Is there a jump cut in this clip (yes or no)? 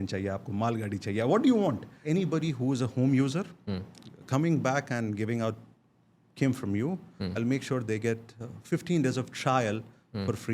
yes